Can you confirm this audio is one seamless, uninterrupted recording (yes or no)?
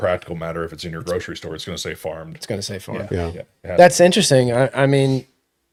yes